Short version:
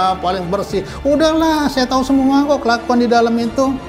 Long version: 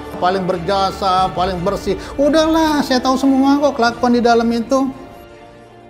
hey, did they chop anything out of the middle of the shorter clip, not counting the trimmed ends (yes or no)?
no